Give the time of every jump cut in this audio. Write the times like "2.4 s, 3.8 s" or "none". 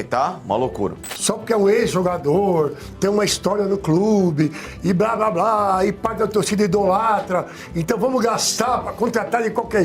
1.1 s